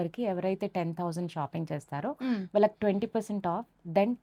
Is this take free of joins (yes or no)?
yes